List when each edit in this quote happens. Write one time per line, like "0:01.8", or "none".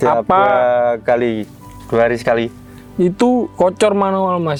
none